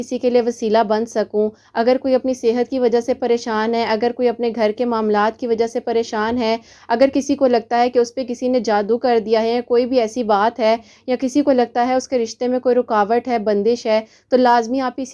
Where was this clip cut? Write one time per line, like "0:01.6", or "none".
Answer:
none

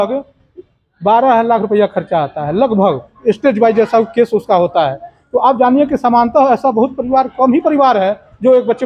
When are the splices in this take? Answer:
none

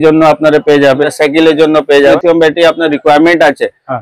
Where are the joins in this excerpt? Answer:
0:01.1
0:02.2

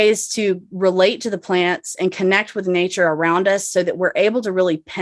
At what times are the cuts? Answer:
none

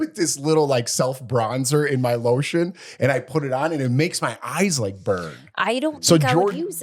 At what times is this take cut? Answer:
none

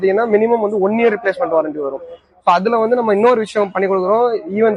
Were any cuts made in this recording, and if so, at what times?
none

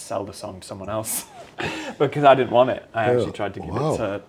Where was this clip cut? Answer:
none

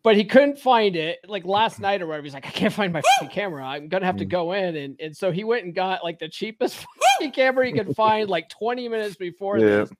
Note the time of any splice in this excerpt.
0:01.2

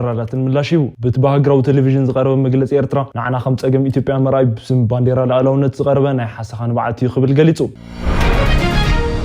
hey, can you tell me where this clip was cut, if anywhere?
0:07.7

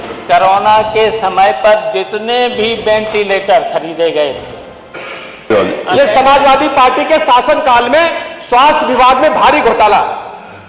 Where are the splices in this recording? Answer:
0:05.5

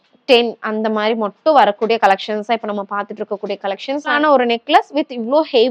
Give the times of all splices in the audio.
0:04.1

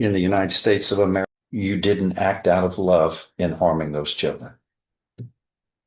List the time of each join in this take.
0:01.2

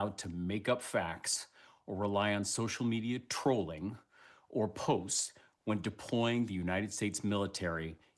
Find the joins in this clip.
none

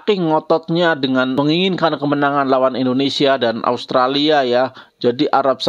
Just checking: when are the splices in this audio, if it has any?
0:01.3

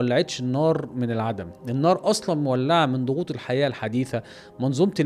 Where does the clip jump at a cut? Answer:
none

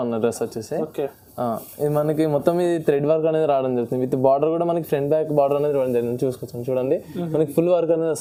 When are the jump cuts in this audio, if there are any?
none

